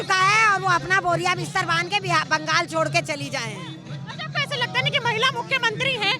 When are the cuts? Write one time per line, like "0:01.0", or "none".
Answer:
none

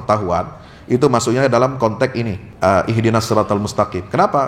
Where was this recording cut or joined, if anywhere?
0:02.4

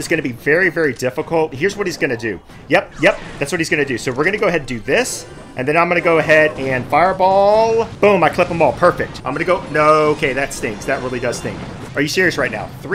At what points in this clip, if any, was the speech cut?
0:01.5
0:07.9
0:09.1
0:11.7

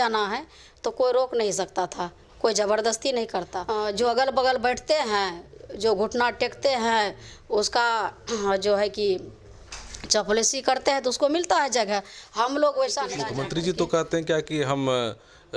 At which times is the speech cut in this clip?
0:03.6
0:13.2

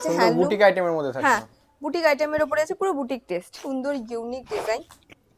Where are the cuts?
0:03.6

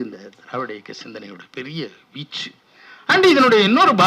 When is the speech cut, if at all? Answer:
none

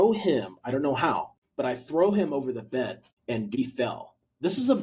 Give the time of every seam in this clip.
0:01.4
0:03.5

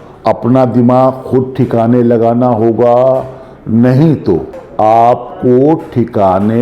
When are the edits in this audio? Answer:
0:04.6

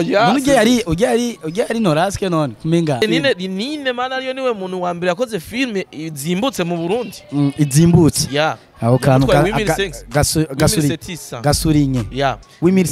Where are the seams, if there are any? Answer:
0:03.0

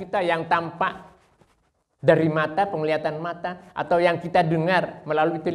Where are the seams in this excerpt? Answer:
none

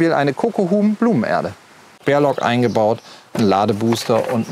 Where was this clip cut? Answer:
0:01.9

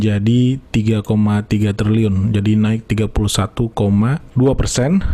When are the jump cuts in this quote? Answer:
0:04.2

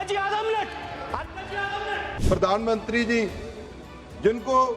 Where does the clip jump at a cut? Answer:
0:02.1

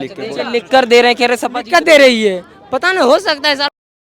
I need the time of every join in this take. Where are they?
none

